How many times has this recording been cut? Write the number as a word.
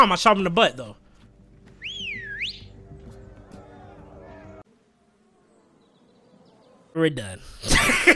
one